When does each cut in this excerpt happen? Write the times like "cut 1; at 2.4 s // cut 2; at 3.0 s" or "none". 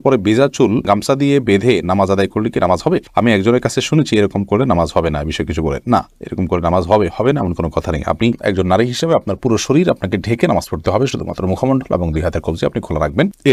none